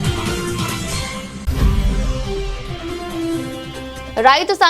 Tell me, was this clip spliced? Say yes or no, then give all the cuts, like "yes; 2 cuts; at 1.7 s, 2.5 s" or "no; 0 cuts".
yes; 1 cut; at 1.3 s